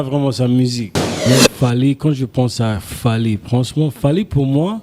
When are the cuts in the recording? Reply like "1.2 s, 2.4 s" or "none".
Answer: 1.3 s